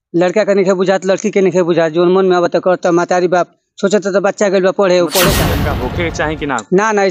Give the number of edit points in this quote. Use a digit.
1